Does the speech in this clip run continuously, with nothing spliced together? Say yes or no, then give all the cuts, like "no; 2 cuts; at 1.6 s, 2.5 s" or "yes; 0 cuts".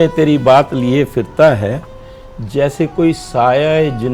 yes; 0 cuts